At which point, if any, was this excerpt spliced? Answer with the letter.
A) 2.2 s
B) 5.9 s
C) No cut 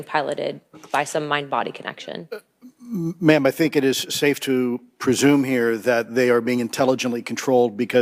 C